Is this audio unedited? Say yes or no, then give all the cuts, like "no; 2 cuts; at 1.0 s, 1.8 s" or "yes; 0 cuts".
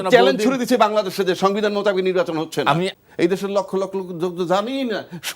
no; 1 cut; at 2.9 s